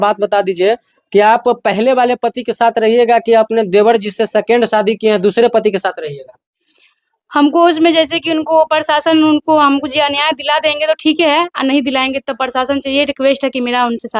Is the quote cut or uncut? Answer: uncut